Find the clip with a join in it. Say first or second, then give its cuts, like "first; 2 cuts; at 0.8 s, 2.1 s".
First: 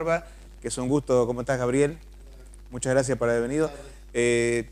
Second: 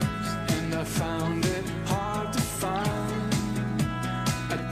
second; 1 cut; at 3.6 s